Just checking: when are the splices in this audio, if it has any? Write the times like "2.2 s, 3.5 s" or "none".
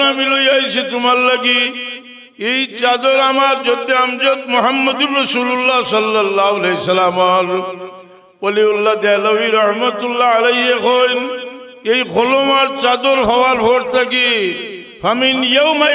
none